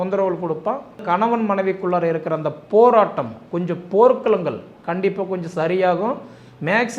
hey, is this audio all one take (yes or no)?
no